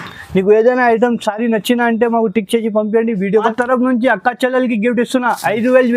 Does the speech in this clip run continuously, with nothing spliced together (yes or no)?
no